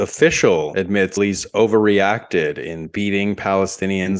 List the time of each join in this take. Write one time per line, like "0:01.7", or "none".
0:01.1